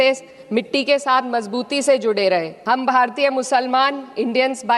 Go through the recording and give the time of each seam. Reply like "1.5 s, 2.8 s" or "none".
2.5 s

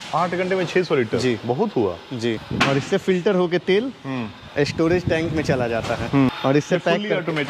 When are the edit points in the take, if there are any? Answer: 2.5 s, 6.3 s

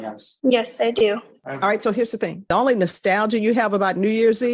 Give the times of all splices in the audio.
1.4 s, 2.4 s

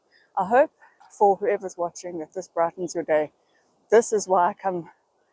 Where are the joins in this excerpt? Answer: 1.0 s

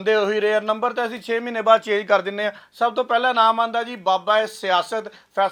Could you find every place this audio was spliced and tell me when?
none

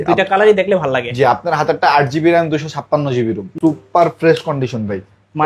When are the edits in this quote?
3.5 s

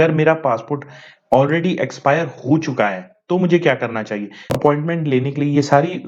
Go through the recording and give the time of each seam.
4.4 s

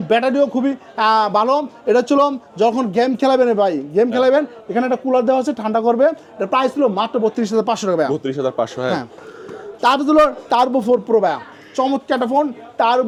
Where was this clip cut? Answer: none

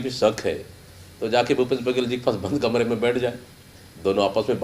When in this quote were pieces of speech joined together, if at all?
none

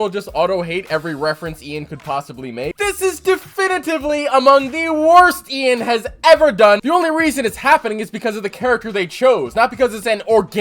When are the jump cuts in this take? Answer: 2.7 s, 6.8 s

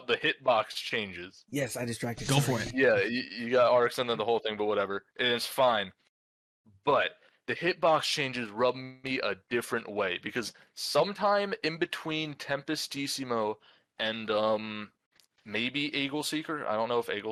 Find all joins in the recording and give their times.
none

